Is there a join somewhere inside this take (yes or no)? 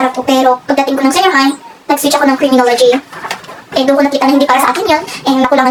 no